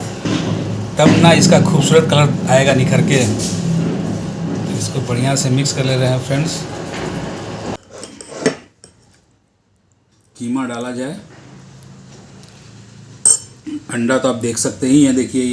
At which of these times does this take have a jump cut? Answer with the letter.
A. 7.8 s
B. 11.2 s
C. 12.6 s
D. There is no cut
A